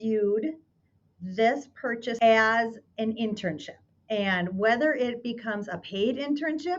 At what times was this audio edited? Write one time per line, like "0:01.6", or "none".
0:02.2